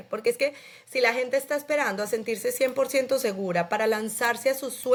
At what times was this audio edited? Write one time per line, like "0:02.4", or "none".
none

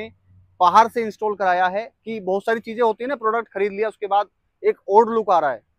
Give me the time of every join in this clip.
none

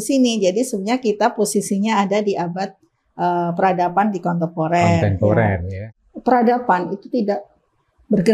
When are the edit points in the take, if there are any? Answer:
0:05.7

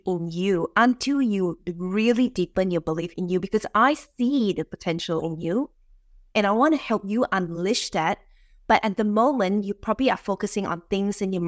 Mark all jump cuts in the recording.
none

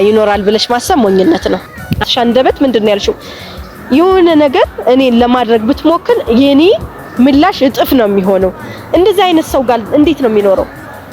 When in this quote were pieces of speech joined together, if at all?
0:02.0

